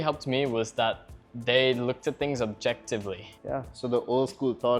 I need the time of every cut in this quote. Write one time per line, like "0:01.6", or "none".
0:03.3